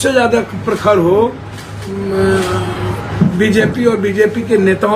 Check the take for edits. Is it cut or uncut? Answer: cut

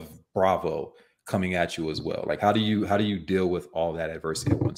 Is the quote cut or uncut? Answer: uncut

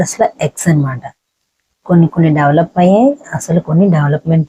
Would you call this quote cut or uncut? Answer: uncut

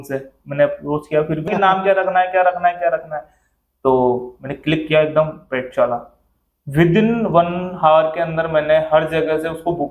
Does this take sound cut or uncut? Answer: cut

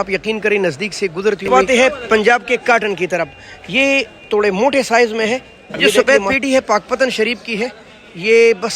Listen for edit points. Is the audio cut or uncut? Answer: cut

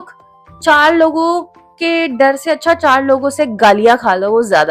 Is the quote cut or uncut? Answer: uncut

